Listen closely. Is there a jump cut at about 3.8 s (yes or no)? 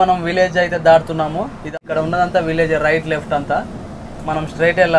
no